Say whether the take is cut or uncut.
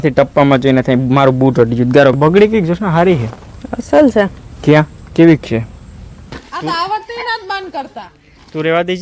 cut